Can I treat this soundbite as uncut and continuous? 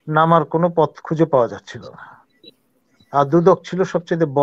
yes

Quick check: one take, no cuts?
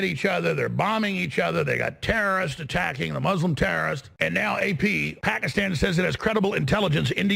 no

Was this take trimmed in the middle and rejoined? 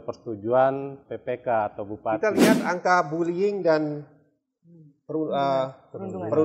yes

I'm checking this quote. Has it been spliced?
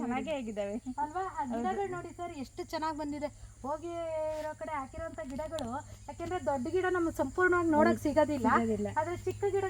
no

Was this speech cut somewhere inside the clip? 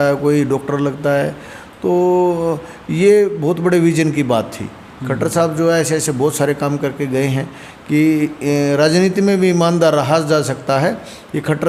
no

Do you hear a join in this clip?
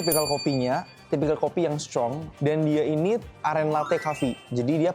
yes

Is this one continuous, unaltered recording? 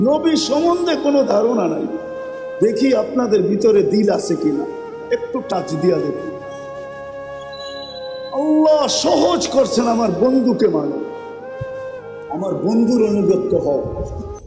no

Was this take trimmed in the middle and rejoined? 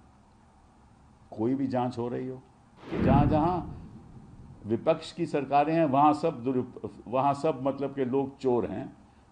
yes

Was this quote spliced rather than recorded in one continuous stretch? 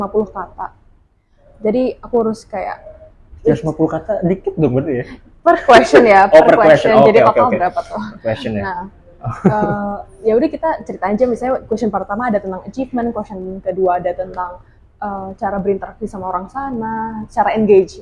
no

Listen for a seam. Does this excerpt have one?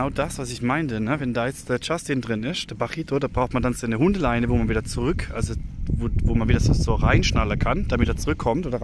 no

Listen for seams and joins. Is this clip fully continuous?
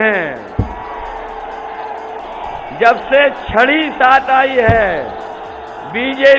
no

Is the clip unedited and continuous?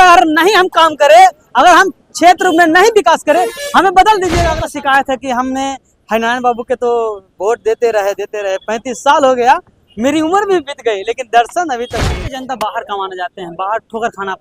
no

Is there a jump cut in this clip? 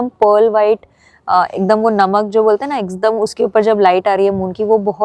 no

